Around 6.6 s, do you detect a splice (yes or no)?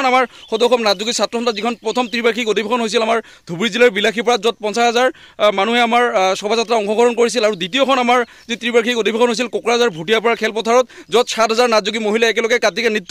no